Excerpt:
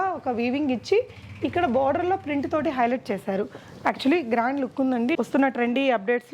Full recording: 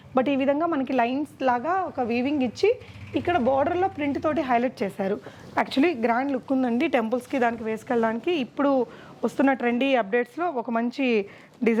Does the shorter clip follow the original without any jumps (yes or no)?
no